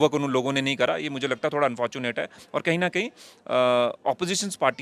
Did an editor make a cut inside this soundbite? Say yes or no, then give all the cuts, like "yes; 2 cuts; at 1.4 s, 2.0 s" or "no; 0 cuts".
no; 0 cuts